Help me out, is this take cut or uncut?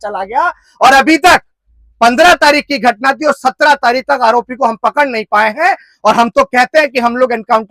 uncut